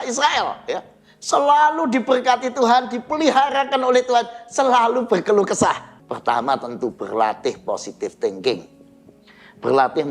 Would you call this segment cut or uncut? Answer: cut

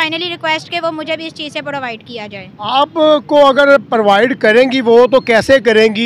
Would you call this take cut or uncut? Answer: uncut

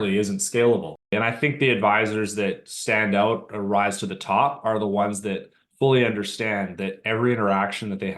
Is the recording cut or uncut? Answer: cut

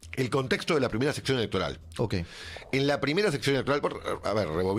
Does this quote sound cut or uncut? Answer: uncut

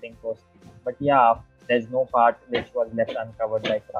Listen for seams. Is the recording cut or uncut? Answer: cut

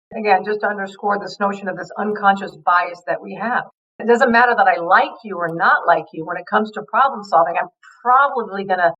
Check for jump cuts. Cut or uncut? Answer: cut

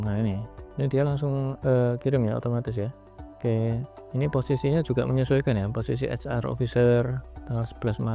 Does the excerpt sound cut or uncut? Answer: uncut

